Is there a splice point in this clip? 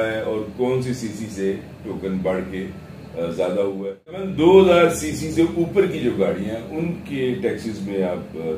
yes; 1 cut; at 4.3 s

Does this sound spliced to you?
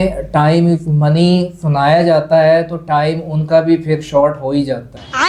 no; 0 cuts

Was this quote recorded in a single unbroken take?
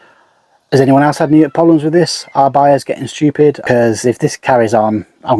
no; 1 cut; at 3.6 s

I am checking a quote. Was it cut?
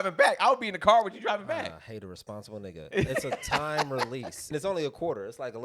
yes; 1 cut; at 4.5 s

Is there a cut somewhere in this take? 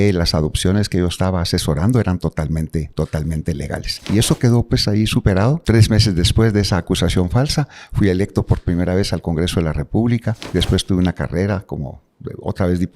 yes; 3 cuts; at 4.1 s, 5.6 s, 10.4 s

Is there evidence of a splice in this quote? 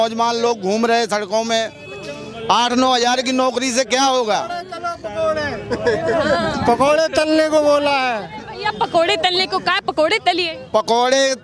no; 0 cuts

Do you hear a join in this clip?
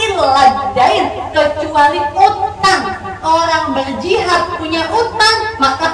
no; 0 cuts

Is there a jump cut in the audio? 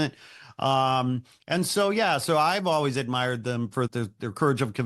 yes; 1 cut; at 3.9 s

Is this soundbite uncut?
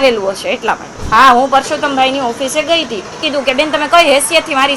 no; 2 cuts; at 0.9 s, 3.2 s

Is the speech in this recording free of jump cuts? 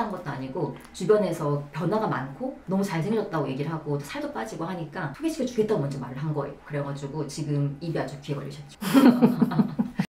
yes; 0 cuts

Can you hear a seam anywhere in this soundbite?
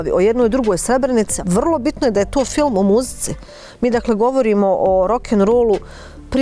yes; 1 cut; at 1.3 s

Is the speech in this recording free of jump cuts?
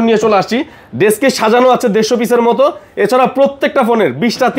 yes; 0 cuts

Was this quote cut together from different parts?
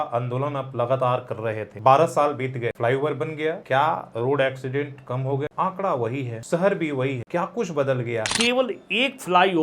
yes; 7 cuts; at 1.7 s, 2.8 s, 3.6 s, 5.5 s, 6.3 s, 7.2 s, 8.3 s

